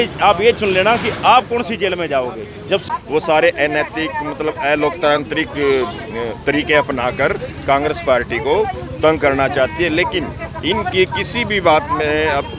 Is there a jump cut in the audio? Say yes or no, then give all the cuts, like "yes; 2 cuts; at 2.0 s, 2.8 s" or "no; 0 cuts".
yes; 1 cut; at 2.8 s